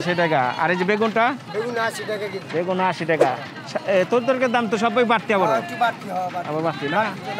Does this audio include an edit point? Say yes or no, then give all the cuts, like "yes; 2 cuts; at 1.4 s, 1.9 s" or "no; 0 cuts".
no; 0 cuts